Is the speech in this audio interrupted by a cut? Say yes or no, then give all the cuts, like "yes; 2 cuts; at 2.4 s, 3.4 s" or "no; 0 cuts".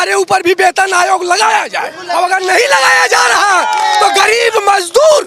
no; 0 cuts